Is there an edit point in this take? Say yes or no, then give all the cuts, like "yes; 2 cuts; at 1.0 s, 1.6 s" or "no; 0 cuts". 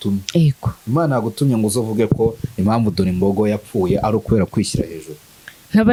no; 0 cuts